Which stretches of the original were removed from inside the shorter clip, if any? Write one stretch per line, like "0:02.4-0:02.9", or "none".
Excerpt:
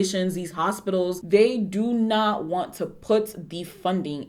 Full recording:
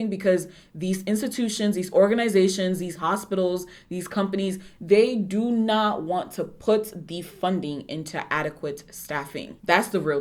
0:03.6-0:04.8

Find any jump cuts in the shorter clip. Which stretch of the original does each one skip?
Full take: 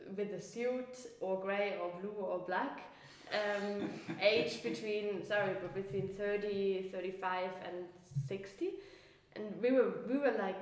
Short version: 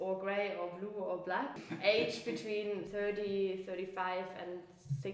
0:02.9-0:04.0
0:05.2-0:06.1

